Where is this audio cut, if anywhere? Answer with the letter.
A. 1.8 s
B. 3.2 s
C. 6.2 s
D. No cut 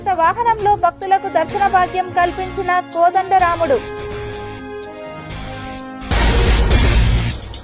D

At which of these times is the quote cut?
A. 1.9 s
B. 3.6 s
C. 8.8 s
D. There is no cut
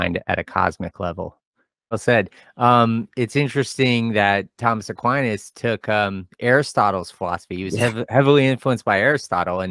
A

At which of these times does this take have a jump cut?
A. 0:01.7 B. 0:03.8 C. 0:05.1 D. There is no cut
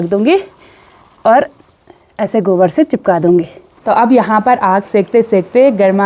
B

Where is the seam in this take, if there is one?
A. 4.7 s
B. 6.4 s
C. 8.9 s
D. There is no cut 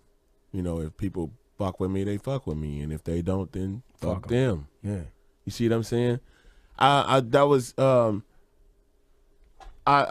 C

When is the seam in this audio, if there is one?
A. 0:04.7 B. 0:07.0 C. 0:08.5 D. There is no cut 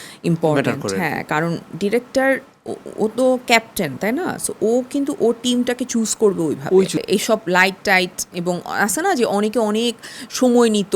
B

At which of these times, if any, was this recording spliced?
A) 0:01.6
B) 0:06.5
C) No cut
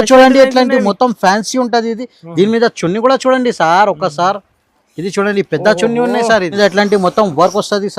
B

